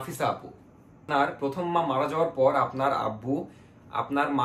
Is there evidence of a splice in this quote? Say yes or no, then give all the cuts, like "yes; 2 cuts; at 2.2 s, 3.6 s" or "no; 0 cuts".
yes; 1 cut; at 1.1 s